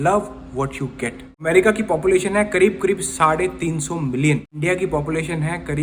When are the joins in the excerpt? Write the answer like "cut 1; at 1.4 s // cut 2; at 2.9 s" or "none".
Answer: cut 1; at 1.3 s // cut 2; at 4.6 s